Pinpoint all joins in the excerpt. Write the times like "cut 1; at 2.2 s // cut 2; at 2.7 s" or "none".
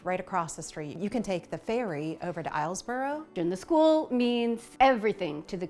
cut 1; at 0.9 s // cut 2; at 3.3 s // cut 3; at 4.7 s